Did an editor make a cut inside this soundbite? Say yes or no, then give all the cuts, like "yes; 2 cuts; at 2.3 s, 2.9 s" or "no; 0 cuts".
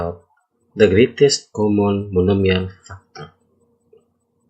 no; 0 cuts